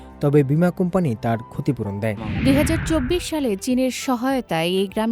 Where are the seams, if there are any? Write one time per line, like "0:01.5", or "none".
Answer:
0:02.3